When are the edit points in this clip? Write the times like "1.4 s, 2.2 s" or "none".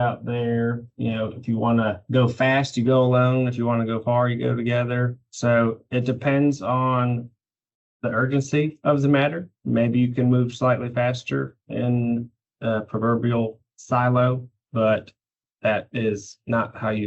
none